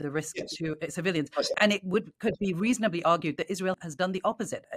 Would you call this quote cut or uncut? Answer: uncut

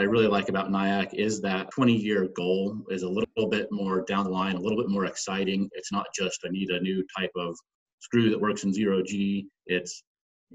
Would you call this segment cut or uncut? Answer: cut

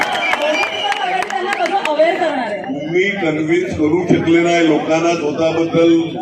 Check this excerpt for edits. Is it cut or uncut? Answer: uncut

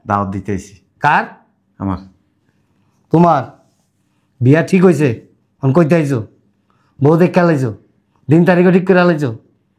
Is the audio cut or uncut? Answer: uncut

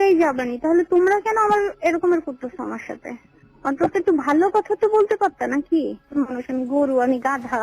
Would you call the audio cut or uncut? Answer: cut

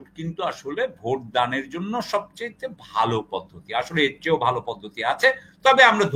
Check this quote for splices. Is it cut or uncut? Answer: uncut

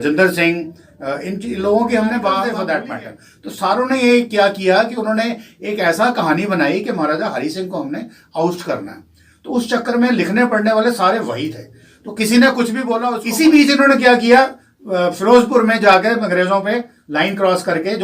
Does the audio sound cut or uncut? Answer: cut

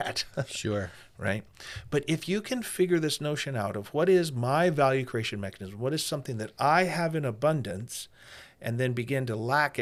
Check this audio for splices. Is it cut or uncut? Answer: uncut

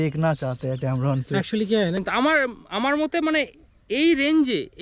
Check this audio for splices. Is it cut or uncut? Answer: cut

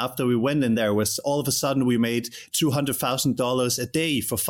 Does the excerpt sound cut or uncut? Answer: uncut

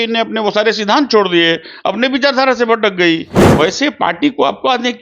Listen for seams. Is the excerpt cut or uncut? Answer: cut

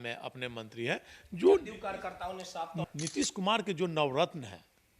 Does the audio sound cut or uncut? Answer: cut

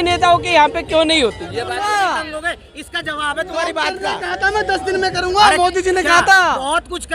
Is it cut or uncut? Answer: cut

